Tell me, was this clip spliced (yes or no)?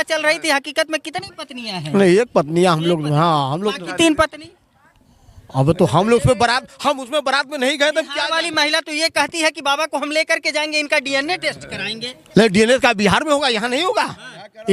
no